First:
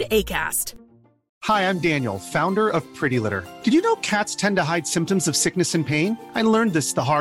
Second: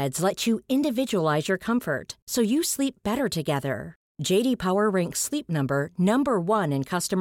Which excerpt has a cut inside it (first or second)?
first